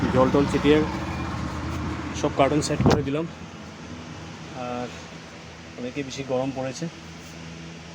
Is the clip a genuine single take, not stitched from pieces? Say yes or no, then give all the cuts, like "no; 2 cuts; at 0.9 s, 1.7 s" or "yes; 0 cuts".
yes; 0 cuts